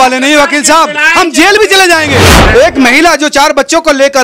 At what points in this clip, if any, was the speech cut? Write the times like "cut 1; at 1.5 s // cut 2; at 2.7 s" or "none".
cut 1; at 2.4 s

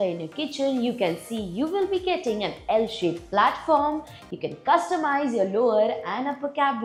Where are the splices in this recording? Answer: none

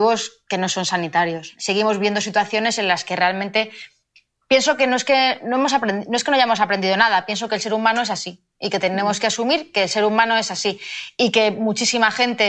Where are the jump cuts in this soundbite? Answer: cut 1; at 1.5 s

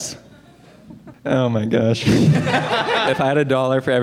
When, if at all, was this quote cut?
cut 1; at 3.0 s

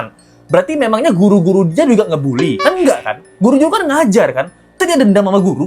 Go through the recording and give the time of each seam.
cut 1; at 4.7 s

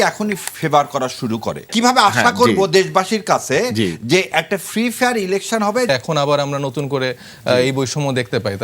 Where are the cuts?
cut 1; at 1.7 s // cut 2; at 5.9 s

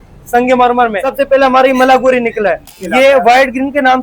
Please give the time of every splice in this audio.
cut 1; at 1.0 s // cut 2; at 2.7 s

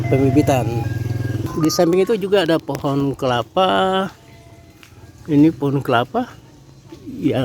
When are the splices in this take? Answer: cut 1; at 1.4 s

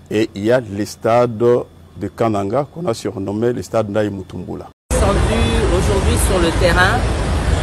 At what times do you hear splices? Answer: cut 1; at 4.7 s

